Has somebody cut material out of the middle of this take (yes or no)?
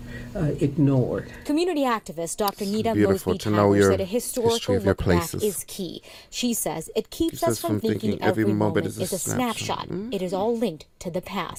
no